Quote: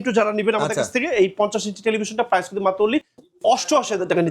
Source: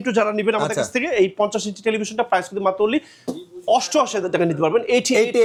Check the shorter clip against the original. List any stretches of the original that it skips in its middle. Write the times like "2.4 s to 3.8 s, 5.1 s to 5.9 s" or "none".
3.2 s to 3.5 s

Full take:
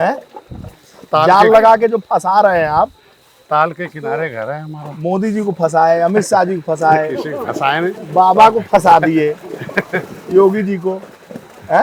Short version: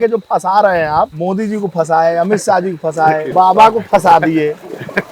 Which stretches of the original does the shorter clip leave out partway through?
3.0 s to 5.0 s, 7.1 s to 8.1 s

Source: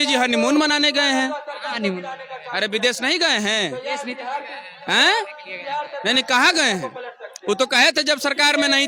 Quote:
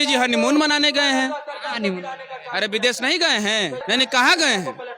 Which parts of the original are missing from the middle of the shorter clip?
3.8 s to 6.0 s

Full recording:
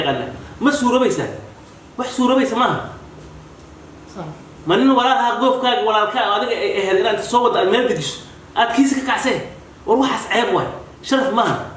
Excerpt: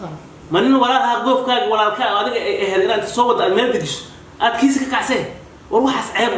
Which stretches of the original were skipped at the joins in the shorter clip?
none

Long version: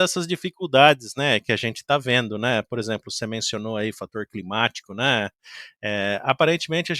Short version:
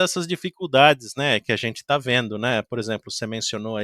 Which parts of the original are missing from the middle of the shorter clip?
none

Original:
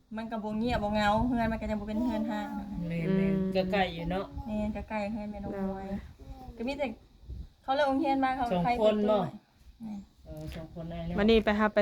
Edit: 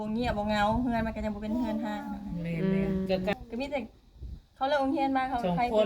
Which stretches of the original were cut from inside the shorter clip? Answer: 3.8 s to 6.4 s

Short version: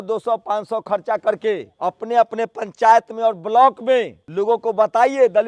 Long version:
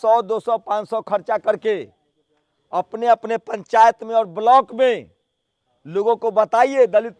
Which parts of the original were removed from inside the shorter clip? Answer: 1.9 s to 2.6 s, 5.1 s to 5.8 s

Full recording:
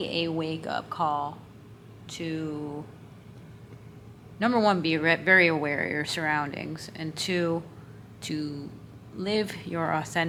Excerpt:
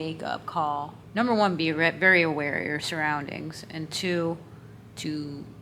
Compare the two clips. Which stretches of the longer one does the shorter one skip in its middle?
1.4 s to 4.2 s

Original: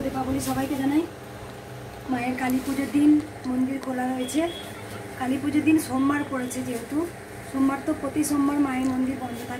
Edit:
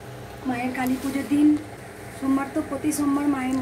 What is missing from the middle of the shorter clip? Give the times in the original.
3.4 s to 7.1 s

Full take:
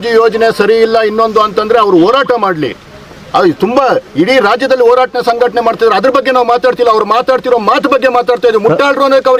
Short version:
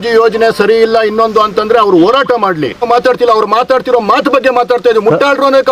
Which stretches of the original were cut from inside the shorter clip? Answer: 2.8 s to 6.4 s

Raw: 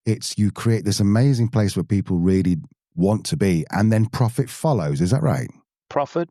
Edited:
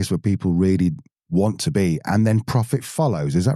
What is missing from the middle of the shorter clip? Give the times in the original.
none

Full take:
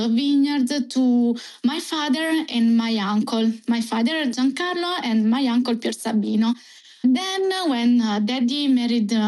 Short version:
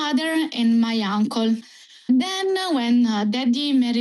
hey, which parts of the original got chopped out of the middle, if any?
3.6 s to 6.6 s

